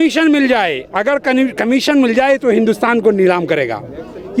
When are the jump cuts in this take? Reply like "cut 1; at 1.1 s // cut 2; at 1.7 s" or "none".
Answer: none